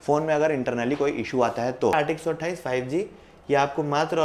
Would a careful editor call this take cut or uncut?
cut